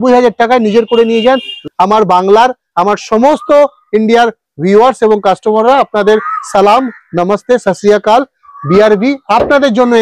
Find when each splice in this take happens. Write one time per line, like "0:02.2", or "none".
0:01.5